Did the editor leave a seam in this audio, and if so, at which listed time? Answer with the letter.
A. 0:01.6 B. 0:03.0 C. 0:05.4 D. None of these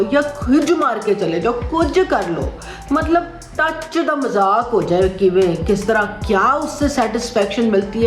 D